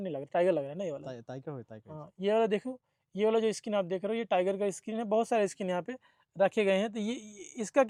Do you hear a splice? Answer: no; 0 cuts

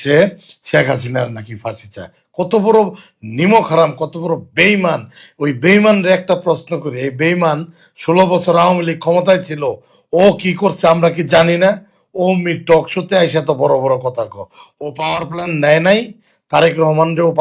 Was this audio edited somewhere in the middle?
no; 0 cuts

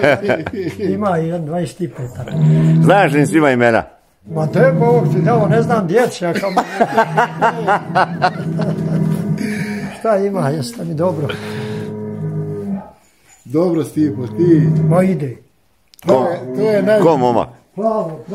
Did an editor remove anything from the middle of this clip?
no; 0 cuts

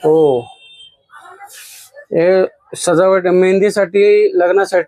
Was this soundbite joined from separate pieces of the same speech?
no; 0 cuts

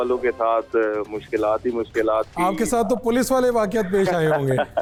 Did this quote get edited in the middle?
no; 0 cuts

